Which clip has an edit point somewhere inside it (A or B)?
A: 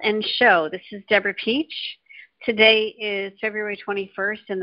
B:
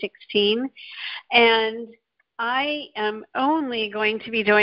A